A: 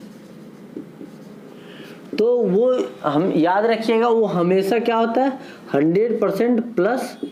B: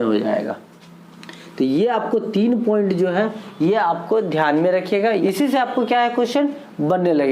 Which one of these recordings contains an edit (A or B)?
B